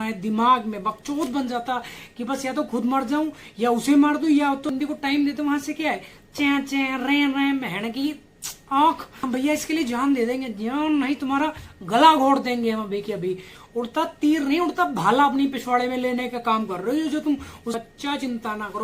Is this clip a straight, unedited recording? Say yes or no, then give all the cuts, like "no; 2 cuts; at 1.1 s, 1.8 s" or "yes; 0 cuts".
no; 4 cuts; at 4.7 s, 9.2 s, 13.5 s, 17.8 s